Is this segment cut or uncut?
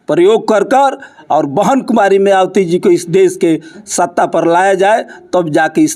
uncut